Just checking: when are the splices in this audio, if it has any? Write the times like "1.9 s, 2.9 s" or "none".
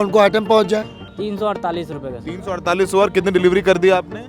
1.0 s